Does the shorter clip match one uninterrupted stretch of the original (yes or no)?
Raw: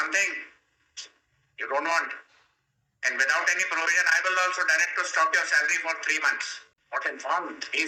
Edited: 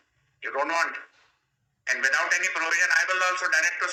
yes